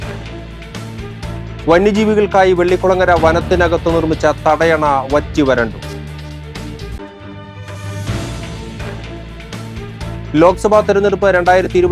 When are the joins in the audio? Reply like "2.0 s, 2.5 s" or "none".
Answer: 0.9 s